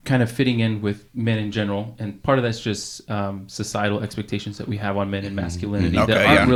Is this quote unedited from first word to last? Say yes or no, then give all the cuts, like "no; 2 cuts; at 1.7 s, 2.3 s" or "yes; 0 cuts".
yes; 0 cuts